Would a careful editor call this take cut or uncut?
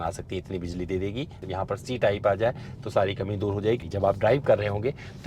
cut